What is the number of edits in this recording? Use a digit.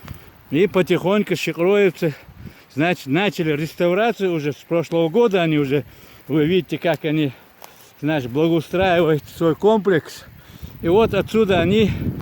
0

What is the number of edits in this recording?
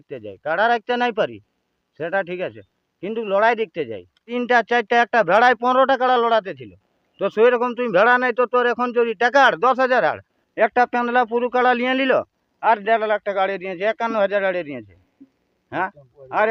2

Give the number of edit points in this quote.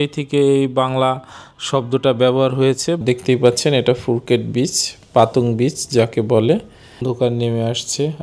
2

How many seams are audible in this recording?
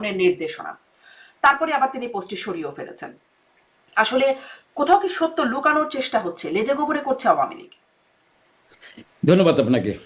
0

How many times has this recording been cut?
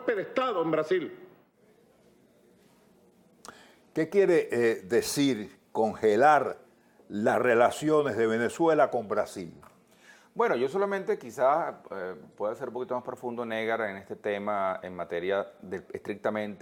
1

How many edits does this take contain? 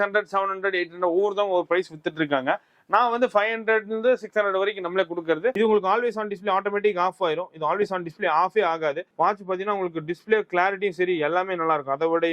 1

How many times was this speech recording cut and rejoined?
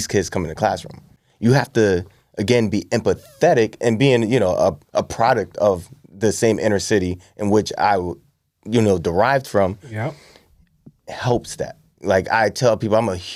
0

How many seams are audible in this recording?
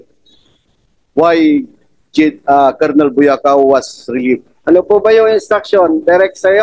1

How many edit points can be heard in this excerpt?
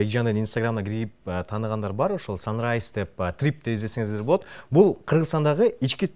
0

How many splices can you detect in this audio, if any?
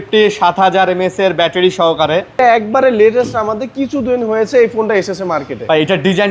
1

